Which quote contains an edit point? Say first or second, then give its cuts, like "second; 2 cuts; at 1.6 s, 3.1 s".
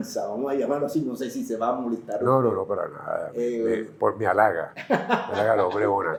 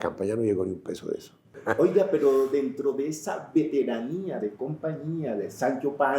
second; 1 cut; at 1.6 s